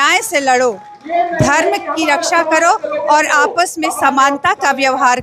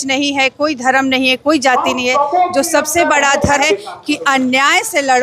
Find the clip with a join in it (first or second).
second